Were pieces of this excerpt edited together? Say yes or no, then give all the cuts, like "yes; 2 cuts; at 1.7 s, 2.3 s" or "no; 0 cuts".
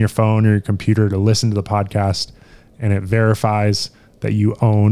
no; 0 cuts